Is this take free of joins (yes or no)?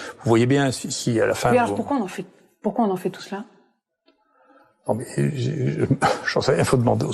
yes